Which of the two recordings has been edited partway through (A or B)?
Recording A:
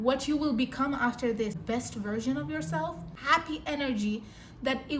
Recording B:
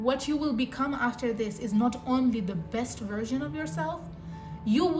A